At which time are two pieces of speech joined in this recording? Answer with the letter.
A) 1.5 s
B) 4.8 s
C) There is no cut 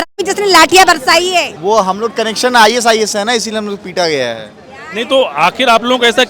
A